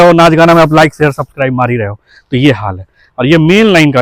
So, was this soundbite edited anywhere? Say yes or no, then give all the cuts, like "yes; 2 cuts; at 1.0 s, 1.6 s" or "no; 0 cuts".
no; 0 cuts